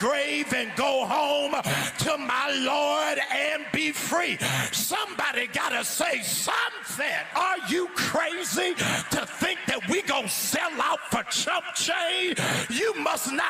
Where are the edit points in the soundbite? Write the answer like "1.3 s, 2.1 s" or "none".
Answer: 7.3 s

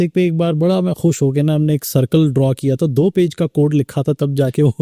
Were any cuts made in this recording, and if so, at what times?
none

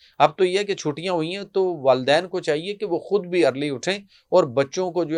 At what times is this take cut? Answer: none

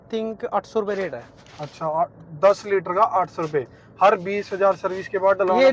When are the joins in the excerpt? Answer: none

